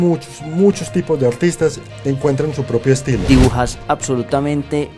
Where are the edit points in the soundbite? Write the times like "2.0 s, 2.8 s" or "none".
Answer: 1.8 s, 3.2 s